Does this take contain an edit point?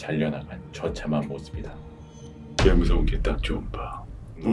yes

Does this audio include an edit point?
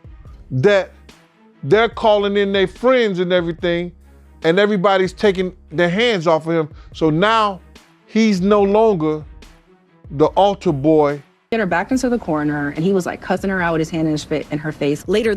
yes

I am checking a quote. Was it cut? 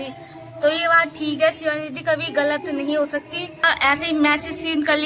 yes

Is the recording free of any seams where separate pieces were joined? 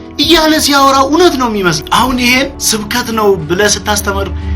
no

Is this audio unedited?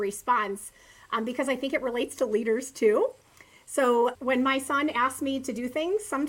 no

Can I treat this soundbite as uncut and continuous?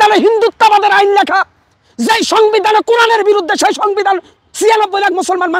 yes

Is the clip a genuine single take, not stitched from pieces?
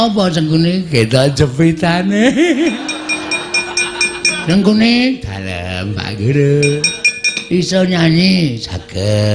no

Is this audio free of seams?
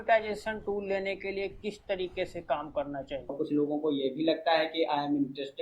no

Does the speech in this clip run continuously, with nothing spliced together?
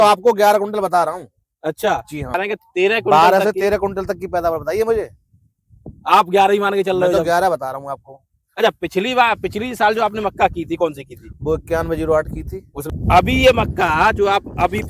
no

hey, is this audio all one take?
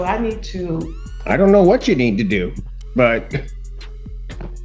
yes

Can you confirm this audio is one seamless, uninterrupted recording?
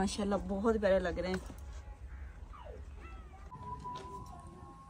no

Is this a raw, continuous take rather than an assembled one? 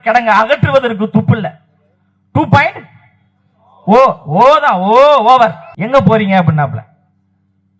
no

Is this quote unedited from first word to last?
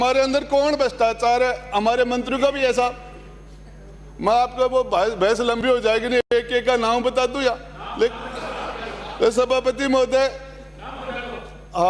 yes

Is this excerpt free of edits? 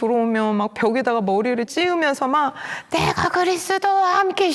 no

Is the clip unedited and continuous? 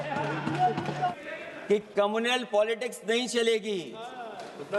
no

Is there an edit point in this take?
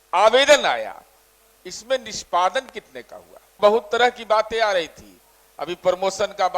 yes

